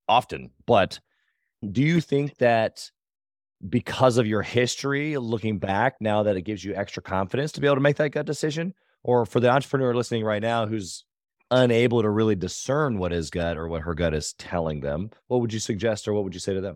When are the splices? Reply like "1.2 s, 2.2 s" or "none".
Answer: none